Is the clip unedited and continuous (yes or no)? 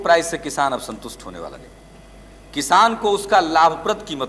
yes